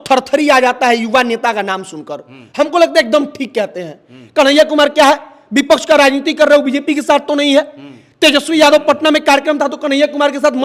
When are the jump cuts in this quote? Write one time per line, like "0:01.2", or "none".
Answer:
none